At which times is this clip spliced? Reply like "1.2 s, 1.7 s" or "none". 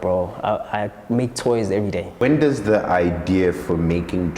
2.2 s